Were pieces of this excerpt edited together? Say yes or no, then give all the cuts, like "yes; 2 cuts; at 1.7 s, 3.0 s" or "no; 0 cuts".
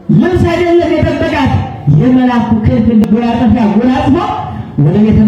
yes; 1 cut; at 3.0 s